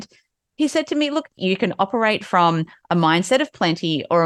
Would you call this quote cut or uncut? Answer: cut